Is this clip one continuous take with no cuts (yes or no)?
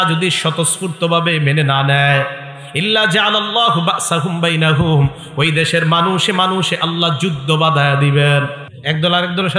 no